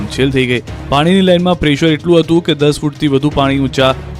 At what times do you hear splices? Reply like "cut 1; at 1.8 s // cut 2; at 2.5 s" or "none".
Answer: cut 1; at 1.0 s

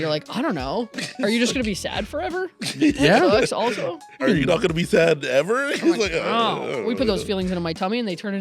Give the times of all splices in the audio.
cut 1; at 4.2 s

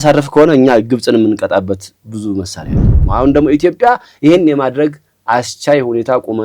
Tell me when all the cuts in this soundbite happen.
cut 1; at 3.0 s

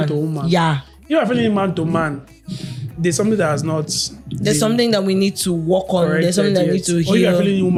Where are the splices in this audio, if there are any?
none

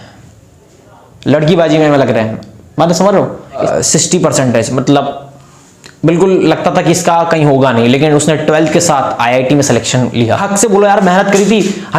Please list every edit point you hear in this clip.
cut 1; at 3.6 s // cut 2; at 10.3 s

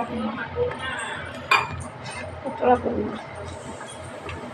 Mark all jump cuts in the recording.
none

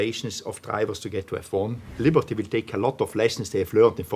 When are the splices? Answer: cut 1; at 1.8 s

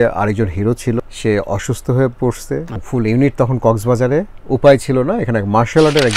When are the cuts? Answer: cut 1; at 1.0 s // cut 2; at 2.8 s // cut 3; at 4.4 s

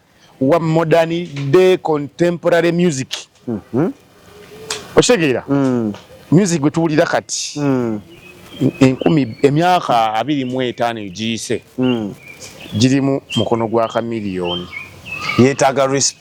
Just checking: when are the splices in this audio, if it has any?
none

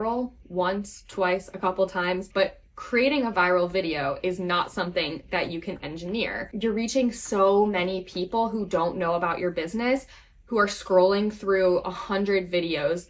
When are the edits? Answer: cut 1; at 2.3 s // cut 2; at 6.5 s

